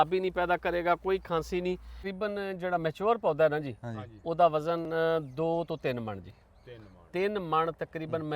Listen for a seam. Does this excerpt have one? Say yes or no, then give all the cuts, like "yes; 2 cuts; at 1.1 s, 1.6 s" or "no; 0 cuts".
yes; 1 cut; at 2.0 s